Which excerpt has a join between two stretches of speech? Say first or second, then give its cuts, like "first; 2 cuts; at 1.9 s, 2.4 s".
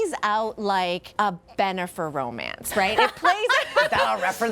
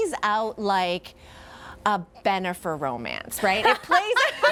first; 1 cut; at 1.1 s